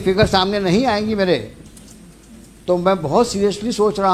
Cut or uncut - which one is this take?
uncut